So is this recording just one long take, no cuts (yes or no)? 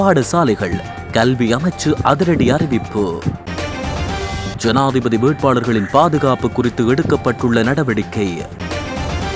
yes